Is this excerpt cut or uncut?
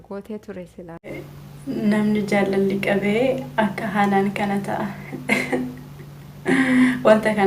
cut